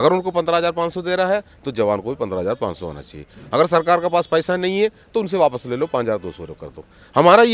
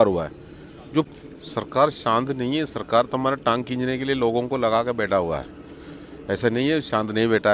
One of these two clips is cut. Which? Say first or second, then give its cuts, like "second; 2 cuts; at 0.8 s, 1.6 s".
second; 1 cut; at 1.1 s